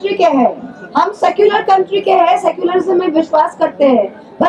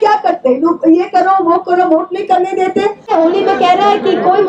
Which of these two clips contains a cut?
second; 1 cut; at 3.1 s

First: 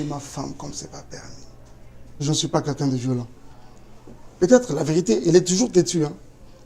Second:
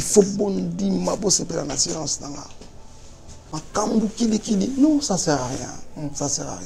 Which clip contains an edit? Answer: first; 1 cut; at 2.2 s

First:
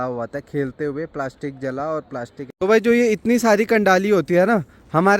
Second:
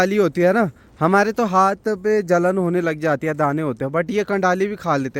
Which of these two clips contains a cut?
first; 1 cut; at 2.4 s

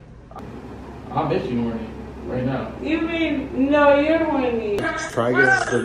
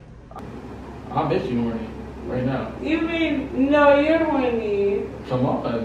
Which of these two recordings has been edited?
first; 1 cut; at 4.8 s

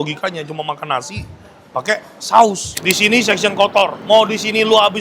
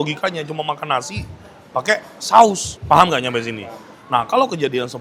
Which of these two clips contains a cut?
first; 2 cuts; at 2.7 s, 4.0 s

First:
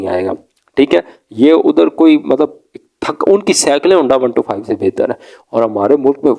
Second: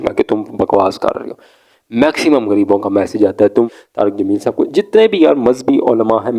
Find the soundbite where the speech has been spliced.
second; 1 cut; at 3.7 s

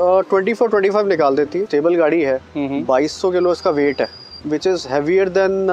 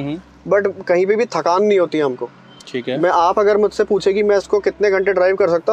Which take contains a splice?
first; 2 cuts; at 1.6 s, 4.3 s

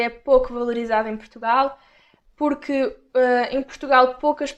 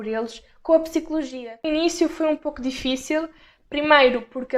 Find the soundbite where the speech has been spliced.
second; 1 cut; at 1.3 s

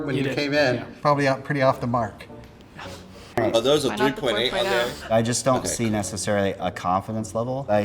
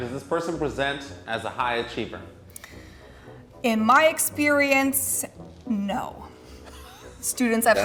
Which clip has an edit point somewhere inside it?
first; 1 cut; at 3.4 s

